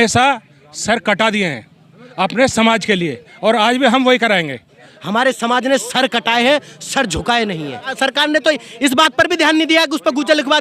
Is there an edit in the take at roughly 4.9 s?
yes; 2 cuts; at 4.9 s, 7.9 s

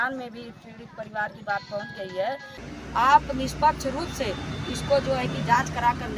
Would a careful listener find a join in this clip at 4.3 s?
no; 1 cut; at 2.6 s

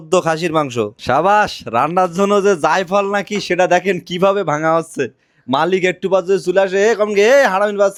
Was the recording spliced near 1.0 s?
no; 0 cuts

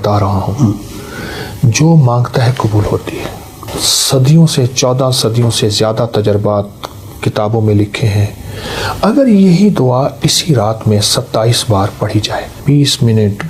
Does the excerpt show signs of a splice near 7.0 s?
no; 2 cuts; at 3.7 s, 12.6 s

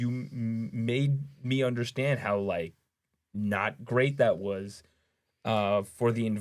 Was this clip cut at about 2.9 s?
no; 0 cuts

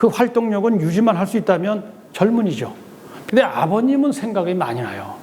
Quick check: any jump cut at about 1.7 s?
no; 1 cut; at 3.1 s

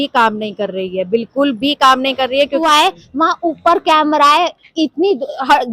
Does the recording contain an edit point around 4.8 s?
no; 1 cut; at 2.6 s

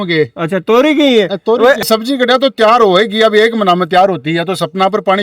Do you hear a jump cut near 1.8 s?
yes; 1 cut; at 1.8 s

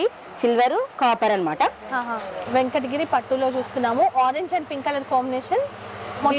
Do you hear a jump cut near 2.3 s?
yes; 1 cut; at 2.3 s

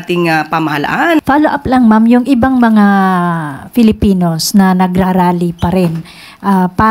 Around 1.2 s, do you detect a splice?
yes; 1 cut; at 1.2 s

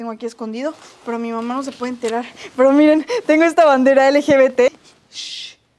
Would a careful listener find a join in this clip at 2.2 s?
no; 1 cut; at 4.7 s

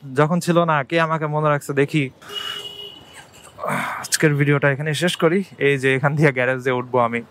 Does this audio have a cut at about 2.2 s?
yes; 1 cut; at 2.2 s

